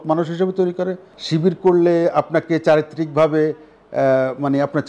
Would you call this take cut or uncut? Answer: cut